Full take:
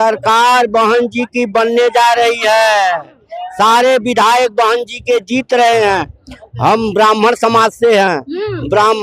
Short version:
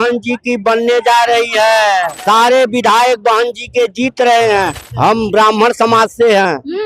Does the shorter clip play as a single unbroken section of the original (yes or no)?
no